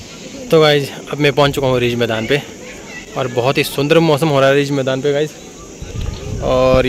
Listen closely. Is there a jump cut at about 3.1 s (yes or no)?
no